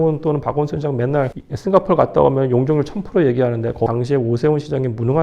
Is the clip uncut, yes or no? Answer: no